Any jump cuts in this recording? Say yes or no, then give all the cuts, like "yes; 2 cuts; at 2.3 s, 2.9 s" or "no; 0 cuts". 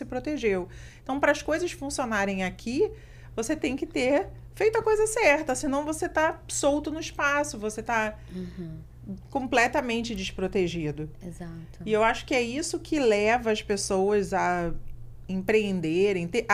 no; 0 cuts